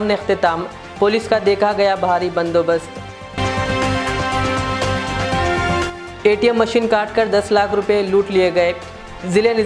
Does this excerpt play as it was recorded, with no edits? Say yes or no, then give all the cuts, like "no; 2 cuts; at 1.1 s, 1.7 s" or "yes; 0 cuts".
yes; 0 cuts